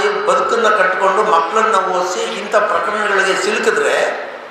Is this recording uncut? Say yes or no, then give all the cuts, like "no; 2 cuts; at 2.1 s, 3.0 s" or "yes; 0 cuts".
yes; 0 cuts